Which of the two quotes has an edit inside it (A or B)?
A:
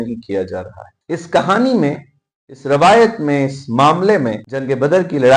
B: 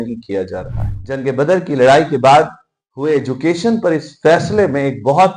B